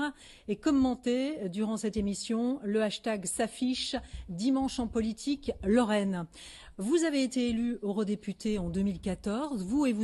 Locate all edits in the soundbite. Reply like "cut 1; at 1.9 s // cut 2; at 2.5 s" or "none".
cut 1; at 1.4 s